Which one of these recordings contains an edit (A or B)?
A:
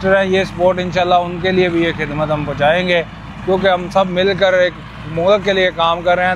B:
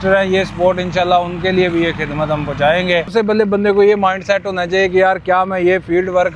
B